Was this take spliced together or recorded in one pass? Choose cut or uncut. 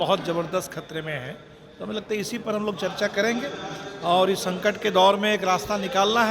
uncut